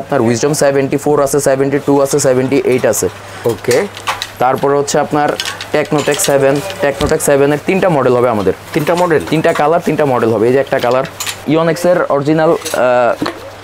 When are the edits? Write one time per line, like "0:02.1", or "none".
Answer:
0:11.4

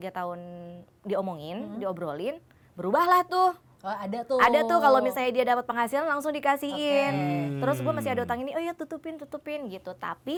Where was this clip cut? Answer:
none

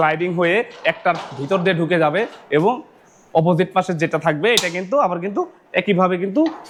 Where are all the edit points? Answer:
none

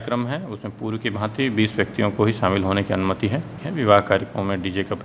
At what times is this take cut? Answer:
0:03.6

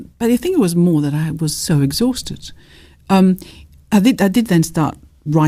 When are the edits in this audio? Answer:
none

